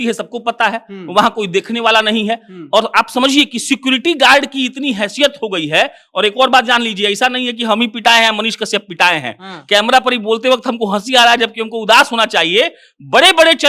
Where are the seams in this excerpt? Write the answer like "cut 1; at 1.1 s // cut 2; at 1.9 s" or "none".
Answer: none